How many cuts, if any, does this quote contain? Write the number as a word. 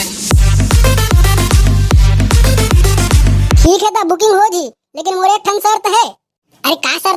one